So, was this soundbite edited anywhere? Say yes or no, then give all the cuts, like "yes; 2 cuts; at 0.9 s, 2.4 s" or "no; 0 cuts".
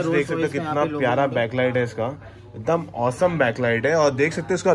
no; 0 cuts